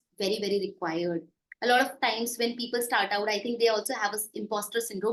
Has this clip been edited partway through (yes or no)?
no